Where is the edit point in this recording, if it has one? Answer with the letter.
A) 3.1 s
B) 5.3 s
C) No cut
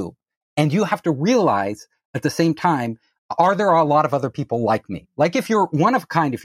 C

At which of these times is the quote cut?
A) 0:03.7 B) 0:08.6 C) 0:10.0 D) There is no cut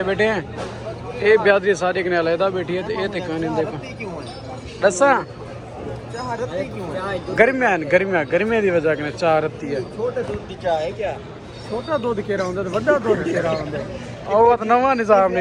D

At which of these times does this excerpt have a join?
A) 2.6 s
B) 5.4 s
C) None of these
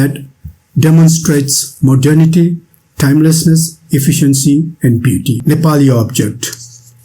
B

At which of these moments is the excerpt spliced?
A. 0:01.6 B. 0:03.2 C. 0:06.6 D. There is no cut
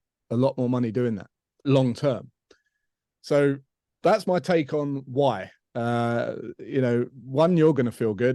A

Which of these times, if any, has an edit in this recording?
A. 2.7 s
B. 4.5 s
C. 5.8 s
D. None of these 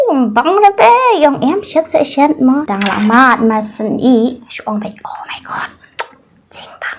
A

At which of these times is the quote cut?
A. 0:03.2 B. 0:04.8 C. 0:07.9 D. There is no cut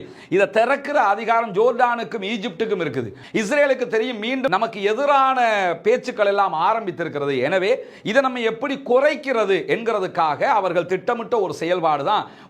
A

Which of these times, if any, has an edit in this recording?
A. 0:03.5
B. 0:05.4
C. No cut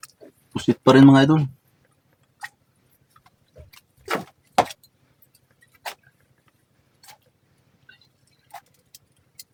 C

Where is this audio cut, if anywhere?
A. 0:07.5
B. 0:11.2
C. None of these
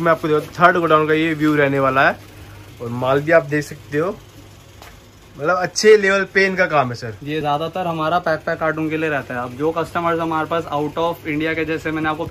C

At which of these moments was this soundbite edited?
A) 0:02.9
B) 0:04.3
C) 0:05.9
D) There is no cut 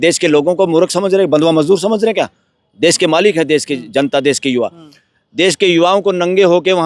D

